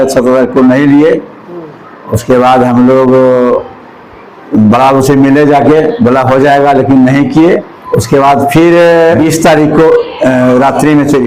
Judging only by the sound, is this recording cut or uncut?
cut